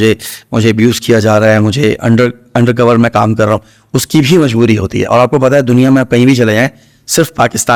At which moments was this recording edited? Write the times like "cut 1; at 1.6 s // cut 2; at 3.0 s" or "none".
none